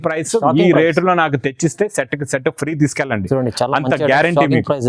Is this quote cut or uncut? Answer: uncut